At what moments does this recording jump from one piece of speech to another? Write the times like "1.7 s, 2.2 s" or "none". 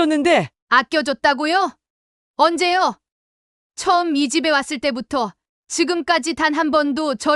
none